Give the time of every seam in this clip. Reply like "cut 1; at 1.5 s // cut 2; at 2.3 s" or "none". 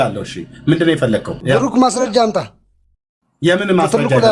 cut 1; at 1.3 s